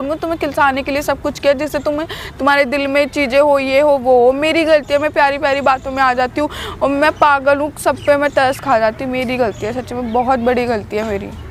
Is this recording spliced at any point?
no; 0 cuts

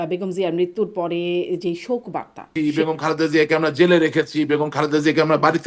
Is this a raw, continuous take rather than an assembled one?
no; 1 cut; at 2.5 s

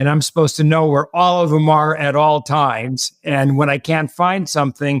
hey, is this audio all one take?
yes; 0 cuts

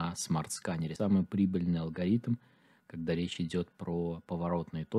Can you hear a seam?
yes; 1 cut; at 1.0 s

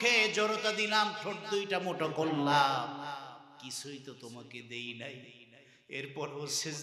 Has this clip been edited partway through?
no; 0 cuts

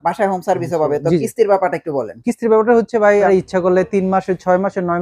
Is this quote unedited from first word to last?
no; 1 cut; at 3.3 s

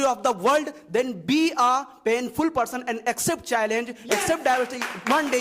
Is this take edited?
no; 0 cuts

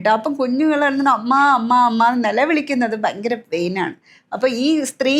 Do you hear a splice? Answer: no; 0 cuts

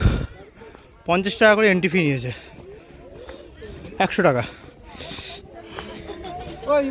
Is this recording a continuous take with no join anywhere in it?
yes; 0 cuts

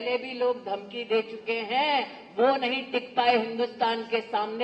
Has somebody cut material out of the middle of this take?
no; 0 cuts

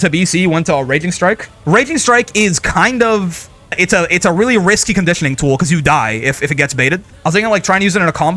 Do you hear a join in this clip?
yes; 3 cuts; at 1.5 s, 3.8 s, 7.1 s

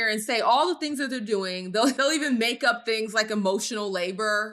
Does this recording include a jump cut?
no; 0 cuts

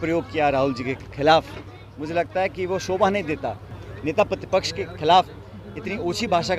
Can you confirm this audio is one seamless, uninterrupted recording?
no; 1 cut; at 3.8 s

